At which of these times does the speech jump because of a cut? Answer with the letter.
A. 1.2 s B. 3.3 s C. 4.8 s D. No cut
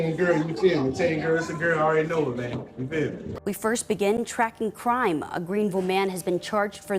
B